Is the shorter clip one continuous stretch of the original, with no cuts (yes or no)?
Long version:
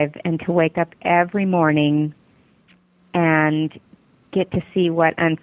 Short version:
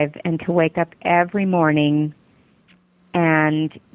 yes